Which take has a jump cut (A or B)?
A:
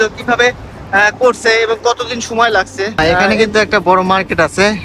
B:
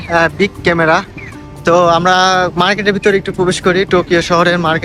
A